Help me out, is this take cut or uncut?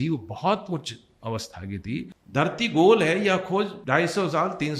cut